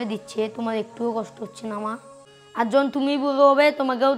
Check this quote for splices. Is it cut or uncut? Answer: cut